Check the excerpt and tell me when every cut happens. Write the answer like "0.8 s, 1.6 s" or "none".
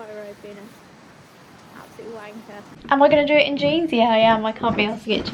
2.7 s